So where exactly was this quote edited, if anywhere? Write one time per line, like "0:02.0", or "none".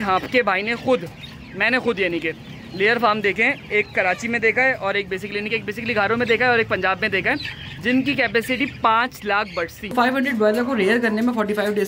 0:09.9